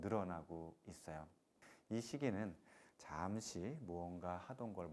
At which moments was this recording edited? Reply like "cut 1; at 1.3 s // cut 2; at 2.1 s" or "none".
cut 1; at 1.7 s